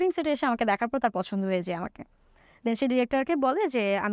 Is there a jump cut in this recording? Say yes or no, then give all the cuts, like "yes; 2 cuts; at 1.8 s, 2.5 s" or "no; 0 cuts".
no; 0 cuts